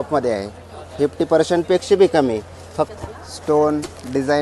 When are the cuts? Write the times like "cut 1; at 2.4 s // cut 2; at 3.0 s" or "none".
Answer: cut 1; at 2.9 s